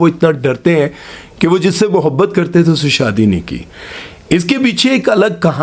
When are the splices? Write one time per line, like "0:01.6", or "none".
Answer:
none